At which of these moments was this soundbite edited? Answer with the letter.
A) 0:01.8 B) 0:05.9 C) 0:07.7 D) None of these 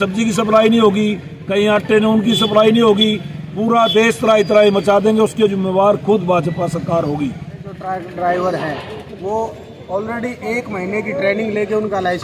C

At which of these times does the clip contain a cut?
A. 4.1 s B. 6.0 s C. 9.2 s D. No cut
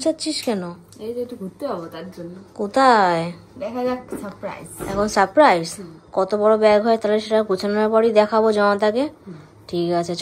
D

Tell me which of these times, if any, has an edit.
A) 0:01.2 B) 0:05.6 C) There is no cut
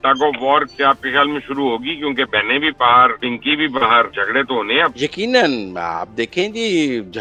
C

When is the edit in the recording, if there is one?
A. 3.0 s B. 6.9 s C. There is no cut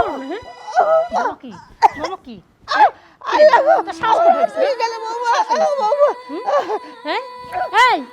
B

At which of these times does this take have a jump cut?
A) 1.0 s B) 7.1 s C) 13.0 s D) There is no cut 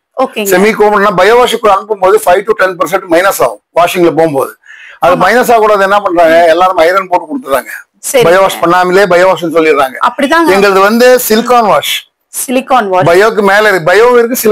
D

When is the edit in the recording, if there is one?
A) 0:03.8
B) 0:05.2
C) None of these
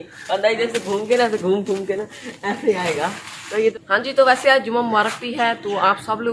A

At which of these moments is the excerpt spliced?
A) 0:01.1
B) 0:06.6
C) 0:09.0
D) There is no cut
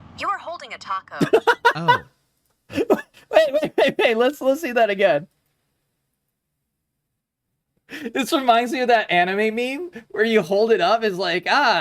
A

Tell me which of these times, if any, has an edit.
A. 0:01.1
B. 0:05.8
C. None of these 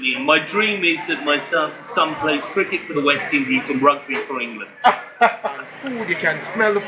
B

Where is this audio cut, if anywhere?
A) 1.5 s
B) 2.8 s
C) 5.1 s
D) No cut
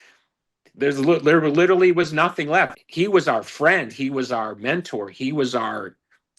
B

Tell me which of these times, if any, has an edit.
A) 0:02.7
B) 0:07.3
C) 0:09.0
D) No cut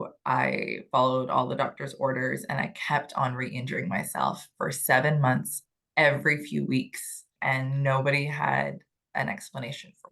B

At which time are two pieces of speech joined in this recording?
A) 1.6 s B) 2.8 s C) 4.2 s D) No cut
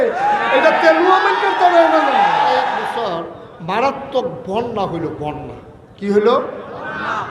B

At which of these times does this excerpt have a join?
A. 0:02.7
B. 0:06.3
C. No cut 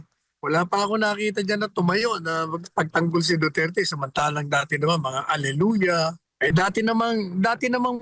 B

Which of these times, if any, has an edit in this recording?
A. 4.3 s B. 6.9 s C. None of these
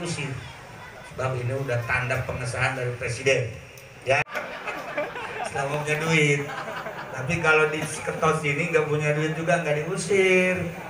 A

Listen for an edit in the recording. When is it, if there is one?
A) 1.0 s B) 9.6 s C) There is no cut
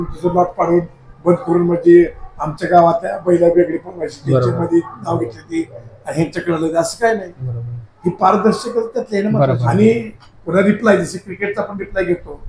B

